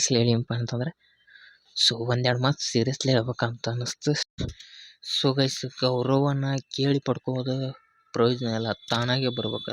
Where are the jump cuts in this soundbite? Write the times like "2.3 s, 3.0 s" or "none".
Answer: 4.3 s